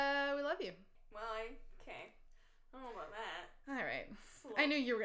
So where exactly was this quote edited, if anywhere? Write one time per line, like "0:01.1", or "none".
0:01.0